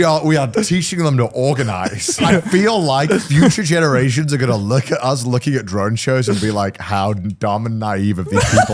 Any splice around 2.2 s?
yes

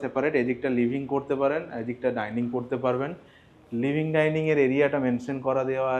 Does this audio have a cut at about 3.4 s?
no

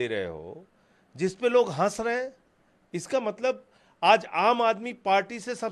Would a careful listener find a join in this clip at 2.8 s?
no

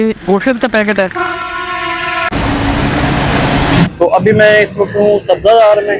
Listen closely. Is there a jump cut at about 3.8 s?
yes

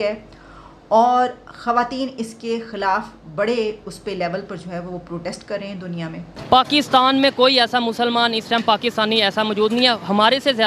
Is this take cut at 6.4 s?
yes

